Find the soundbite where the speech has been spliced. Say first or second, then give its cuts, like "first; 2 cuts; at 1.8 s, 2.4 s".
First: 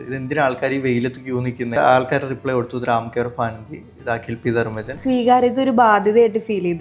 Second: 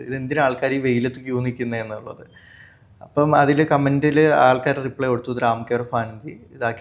first; 2 cuts; at 1.8 s, 4.9 s